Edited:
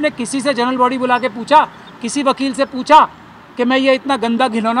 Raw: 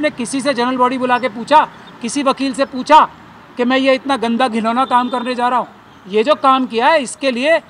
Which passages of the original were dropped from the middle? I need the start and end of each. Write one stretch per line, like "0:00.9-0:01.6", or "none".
none